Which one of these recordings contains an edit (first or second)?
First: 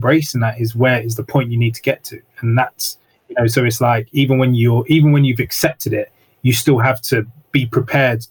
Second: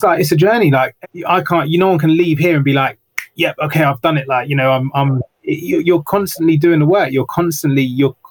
second